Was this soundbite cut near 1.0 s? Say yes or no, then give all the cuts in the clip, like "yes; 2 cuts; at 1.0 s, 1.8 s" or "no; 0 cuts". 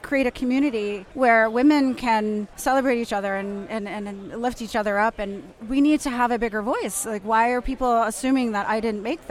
yes; 2 cuts; at 1.0 s, 2.5 s